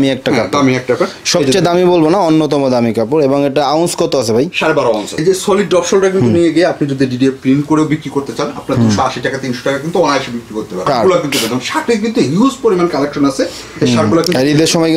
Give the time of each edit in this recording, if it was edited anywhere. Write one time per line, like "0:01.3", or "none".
0:05.2
0:10.8